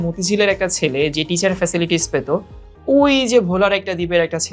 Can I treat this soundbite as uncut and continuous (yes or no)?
yes